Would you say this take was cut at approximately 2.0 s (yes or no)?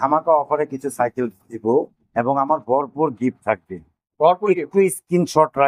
yes